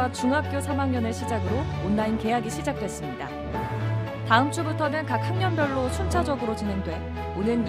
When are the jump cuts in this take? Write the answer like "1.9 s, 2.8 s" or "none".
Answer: none